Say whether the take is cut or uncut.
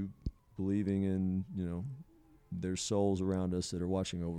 uncut